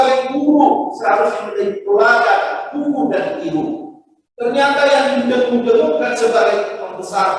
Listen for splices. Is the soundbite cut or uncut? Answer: uncut